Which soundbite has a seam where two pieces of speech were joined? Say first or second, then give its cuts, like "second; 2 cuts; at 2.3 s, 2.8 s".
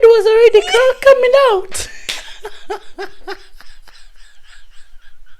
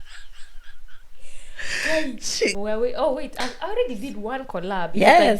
second; 1 cut; at 2.6 s